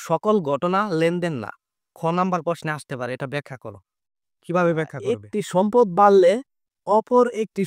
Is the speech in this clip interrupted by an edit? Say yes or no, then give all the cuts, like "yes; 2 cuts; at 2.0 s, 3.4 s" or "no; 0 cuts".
yes; 1 cut; at 5.2 s